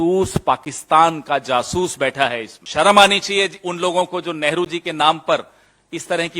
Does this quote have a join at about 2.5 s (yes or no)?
yes